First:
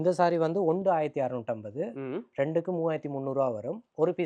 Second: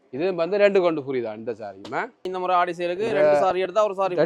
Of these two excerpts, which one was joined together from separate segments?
second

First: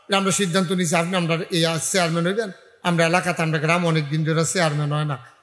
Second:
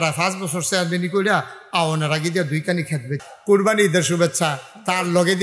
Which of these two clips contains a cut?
second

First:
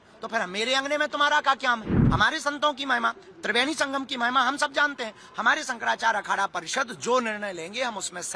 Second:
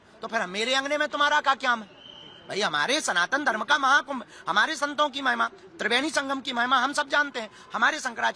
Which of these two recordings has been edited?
first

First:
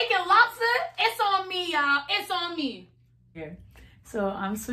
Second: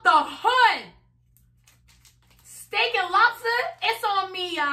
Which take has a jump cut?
first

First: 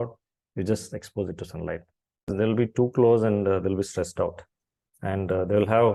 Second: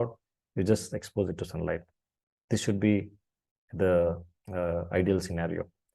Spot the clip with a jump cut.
first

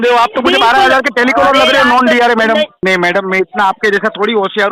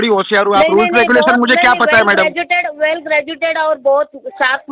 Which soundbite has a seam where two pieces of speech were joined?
first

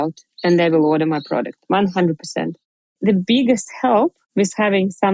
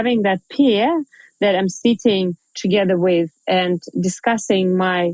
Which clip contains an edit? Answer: first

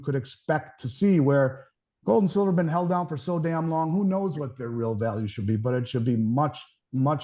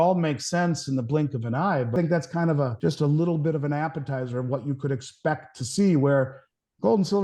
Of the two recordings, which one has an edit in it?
second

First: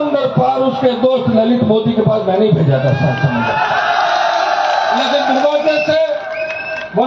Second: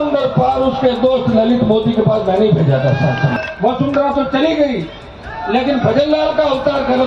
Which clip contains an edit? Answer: second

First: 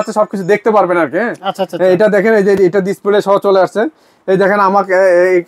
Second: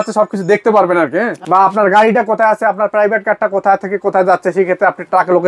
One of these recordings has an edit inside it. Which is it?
second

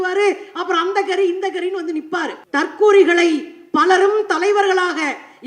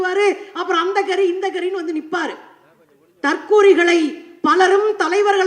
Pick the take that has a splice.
first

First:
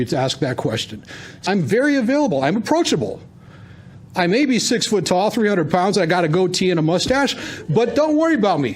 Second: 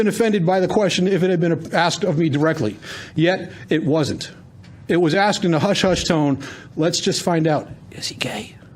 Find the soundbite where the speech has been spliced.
first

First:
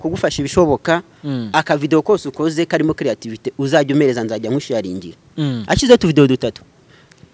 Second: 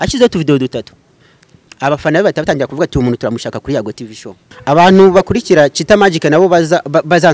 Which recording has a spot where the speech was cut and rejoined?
second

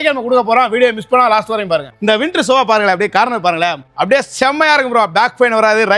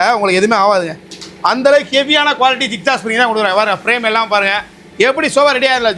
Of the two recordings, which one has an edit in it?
first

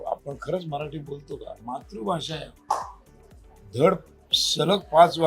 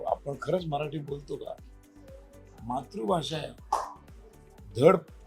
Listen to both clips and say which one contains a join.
first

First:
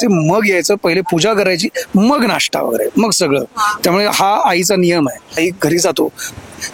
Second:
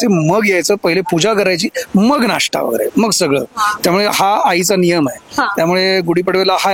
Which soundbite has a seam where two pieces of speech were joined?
first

